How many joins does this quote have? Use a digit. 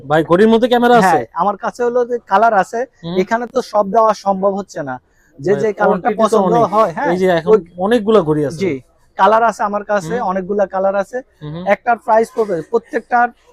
0